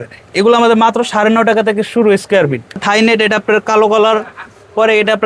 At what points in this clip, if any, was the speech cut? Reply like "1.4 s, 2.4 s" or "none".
2.8 s